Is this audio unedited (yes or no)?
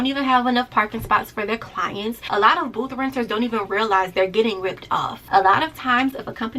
no